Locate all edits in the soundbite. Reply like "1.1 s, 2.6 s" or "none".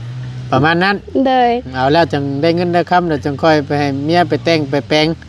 none